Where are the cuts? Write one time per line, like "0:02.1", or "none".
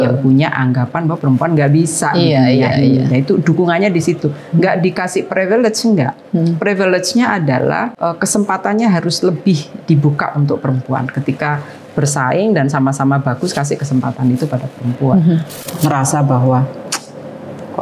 0:07.9
0:15.6